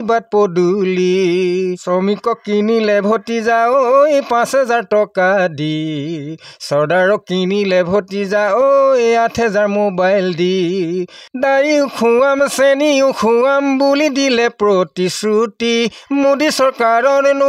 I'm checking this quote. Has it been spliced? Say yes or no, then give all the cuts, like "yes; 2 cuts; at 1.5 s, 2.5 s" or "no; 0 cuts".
yes; 1 cut; at 1.8 s